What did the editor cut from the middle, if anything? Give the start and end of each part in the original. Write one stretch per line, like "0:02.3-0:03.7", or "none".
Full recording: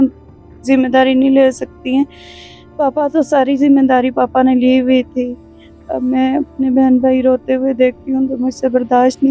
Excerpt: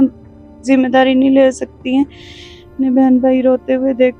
0:02.7-0:06.5